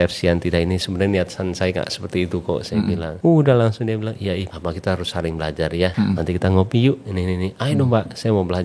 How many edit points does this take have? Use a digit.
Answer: 3